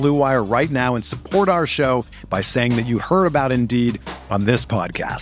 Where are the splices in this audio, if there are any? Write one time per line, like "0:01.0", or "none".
none